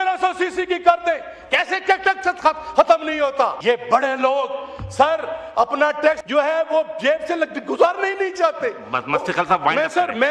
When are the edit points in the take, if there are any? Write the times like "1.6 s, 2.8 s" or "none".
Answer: 3.6 s, 6.2 s